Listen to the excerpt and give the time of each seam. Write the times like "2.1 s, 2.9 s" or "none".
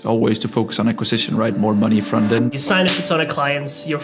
2.5 s